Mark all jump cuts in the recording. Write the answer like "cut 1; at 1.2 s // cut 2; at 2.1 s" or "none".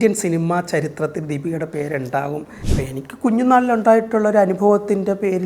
cut 1; at 2.6 s